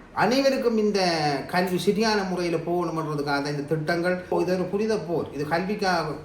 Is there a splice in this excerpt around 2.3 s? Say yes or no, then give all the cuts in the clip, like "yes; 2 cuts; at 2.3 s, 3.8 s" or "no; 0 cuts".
no; 1 cut; at 4.3 s